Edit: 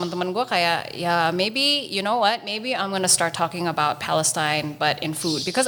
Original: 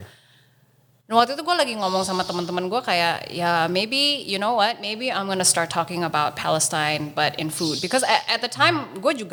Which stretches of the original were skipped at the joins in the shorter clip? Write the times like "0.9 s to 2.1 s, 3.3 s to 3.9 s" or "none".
none

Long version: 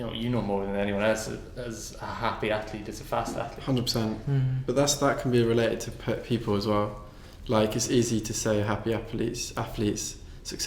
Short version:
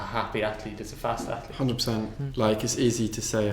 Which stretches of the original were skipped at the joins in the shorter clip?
4.3 s to 7.3 s

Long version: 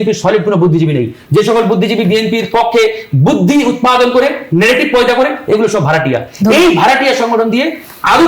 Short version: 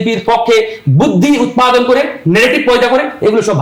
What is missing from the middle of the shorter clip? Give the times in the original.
none

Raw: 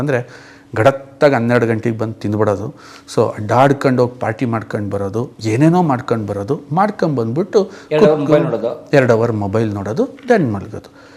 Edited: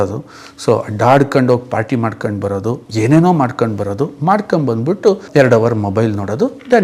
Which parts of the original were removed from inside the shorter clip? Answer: 7.7 s to 8.8 s

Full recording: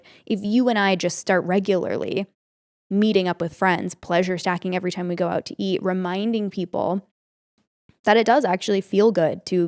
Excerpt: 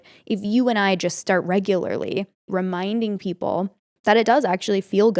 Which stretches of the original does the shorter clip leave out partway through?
2.5 s to 5.8 s, 7.2 s to 7.9 s

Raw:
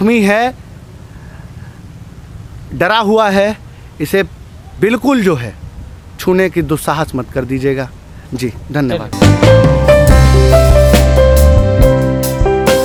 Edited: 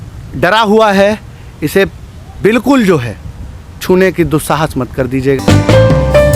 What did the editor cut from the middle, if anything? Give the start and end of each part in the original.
7.8 s to 9.1 s

